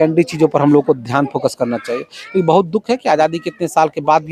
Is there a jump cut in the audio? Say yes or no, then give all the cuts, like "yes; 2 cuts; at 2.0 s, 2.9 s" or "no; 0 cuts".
no; 0 cuts